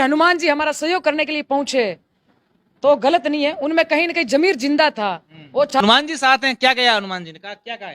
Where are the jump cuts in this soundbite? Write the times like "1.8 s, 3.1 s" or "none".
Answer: 5.7 s